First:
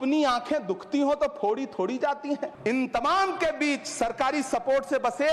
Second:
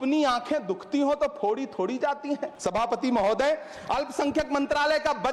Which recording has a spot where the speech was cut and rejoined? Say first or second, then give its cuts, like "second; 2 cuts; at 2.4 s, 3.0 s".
first; 1 cut; at 2.5 s